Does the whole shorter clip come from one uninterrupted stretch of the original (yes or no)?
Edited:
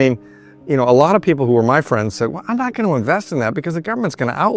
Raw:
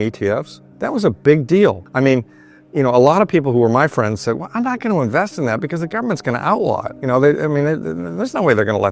yes